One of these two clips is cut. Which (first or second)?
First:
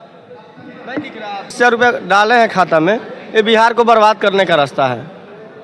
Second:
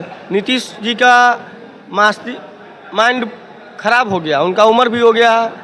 first